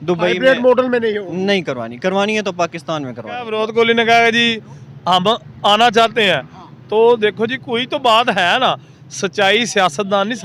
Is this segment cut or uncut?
cut